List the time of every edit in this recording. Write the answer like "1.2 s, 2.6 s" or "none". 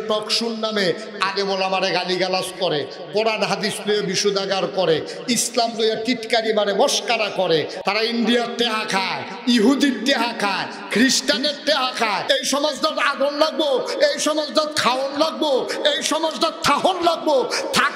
7.8 s, 12.2 s

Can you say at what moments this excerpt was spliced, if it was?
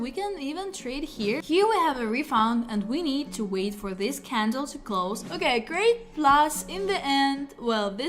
1.4 s, 5.2 s

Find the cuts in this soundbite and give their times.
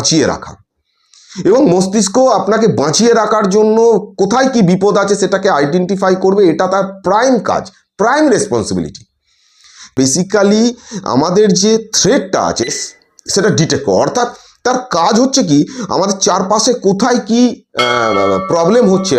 9.9 s

